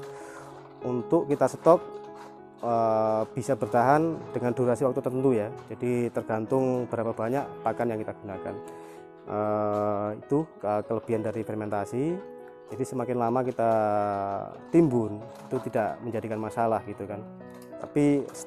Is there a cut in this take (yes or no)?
no